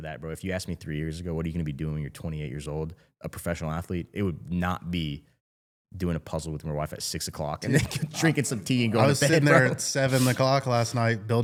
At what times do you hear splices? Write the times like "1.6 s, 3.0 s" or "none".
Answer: none